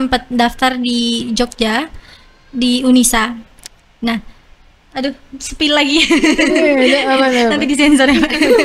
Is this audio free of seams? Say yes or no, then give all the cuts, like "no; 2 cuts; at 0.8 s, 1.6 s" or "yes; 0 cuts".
yes; 0 cuts